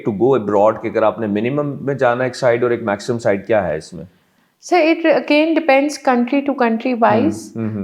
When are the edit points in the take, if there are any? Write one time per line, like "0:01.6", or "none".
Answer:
none